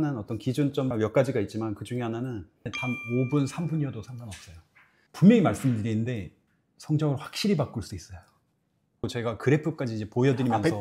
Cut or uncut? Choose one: cut